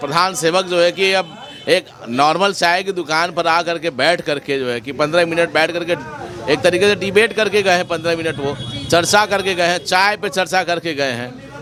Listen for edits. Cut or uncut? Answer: uncut